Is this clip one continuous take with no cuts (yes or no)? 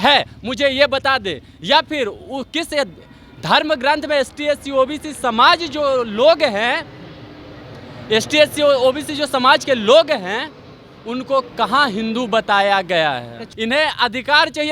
no